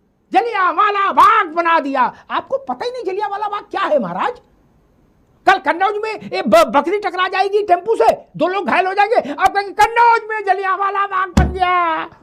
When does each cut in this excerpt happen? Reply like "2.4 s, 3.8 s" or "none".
none